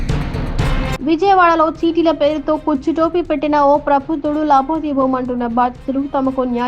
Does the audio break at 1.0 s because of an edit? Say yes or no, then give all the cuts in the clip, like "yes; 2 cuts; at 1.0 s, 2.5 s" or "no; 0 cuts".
no; 0 cuts